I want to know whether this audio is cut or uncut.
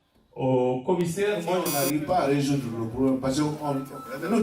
cut